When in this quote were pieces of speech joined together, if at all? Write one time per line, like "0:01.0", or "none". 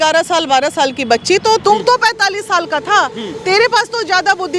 0:01.6